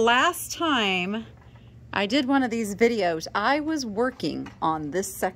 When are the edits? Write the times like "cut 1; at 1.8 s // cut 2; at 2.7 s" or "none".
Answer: none

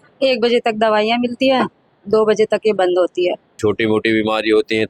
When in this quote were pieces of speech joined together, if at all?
cut 1; at 3.5 s

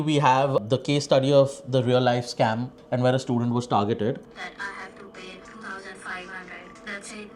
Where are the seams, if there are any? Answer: cut 1; at 2.8 s // cut 2; at 4.3 s

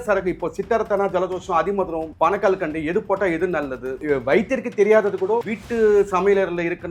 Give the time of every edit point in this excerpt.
cut 1; at 2.1 s // cut 2; at 4.0 s // cut 3; at 5.6 s

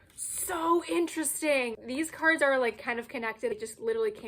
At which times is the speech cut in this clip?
cut 1; at 1.8 s // cut 2; at 3.5 s

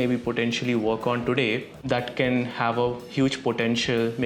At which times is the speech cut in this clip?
cut 1; at 1.8 s

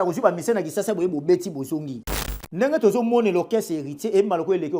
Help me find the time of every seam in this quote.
cut 1; at 2.0 s

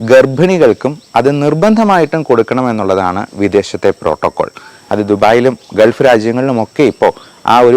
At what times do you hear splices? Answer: none

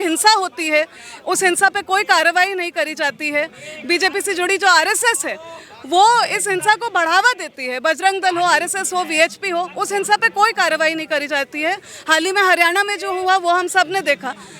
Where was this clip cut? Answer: none

